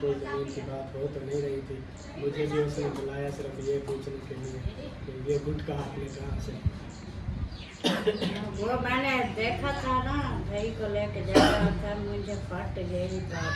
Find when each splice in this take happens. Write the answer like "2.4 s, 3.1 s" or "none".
none